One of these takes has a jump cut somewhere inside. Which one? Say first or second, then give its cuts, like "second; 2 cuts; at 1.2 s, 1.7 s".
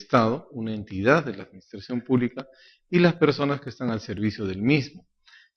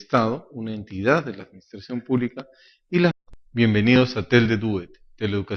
first; 1 cut; at 3.2 s